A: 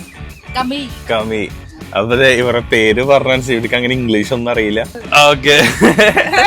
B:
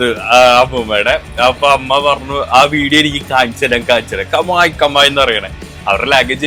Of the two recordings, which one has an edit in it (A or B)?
A